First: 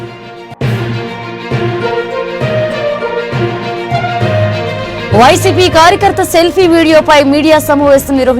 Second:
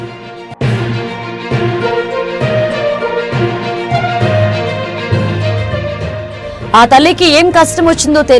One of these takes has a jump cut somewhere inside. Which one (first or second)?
second